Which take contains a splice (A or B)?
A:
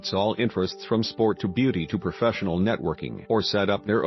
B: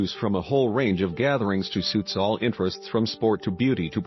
A